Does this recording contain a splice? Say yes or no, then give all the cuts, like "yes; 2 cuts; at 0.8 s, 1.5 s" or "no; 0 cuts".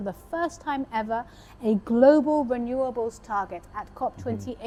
no; 0 cuts